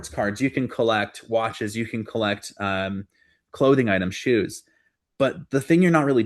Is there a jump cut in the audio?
no; 0 cuts

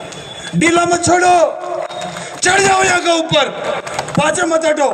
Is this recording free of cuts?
yes; 0 cuts

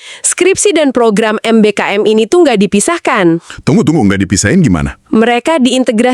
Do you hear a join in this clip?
no; 0 cuts

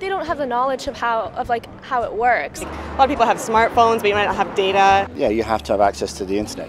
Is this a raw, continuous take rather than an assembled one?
no; 1 cut; at 5.1 s

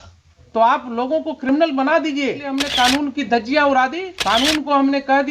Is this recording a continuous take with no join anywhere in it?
no; 2 cuts; at 2.6 s, 4.1 s

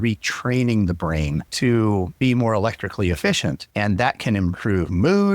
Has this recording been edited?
yes; 3 cuts; at 1.4 s, 2.1 s, 3.6 s

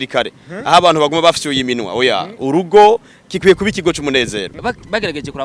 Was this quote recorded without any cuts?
no; 1 cut; at 4.5 s

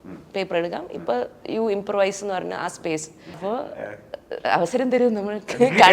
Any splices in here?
yes; 1 cut; at 3.4 s

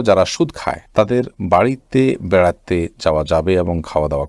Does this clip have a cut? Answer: no; 0 cuts

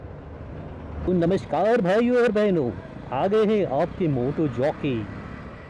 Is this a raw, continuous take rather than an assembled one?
no; 1 cut; at 1.0 s

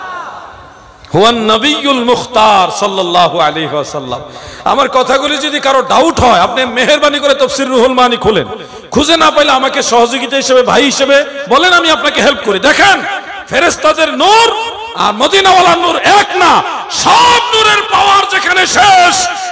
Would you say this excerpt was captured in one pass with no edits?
yes; 0 cuts

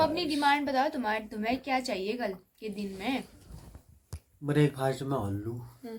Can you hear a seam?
no; 0 cuts

